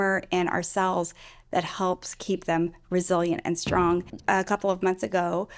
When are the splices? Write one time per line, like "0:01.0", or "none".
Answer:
0:04.1